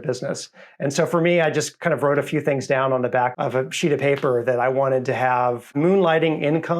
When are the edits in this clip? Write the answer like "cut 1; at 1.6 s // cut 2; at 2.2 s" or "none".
cut 1; at 3.3 s // cut 2; at 5.7 s